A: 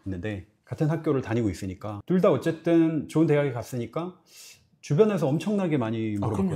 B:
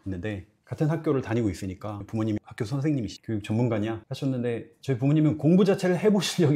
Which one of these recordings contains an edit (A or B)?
B